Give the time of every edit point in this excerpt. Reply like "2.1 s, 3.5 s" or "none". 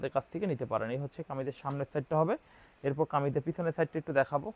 none